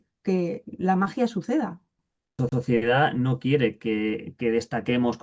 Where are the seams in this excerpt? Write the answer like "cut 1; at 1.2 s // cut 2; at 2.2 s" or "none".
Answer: cut 1; at 2.5 s